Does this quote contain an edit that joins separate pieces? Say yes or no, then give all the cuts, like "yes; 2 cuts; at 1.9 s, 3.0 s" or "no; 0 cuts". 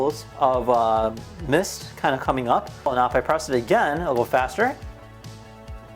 yes; 1 cut; at 2.9 s